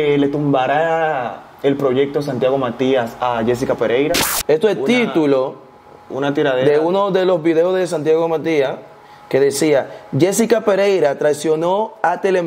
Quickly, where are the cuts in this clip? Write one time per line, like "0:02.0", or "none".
0:04.3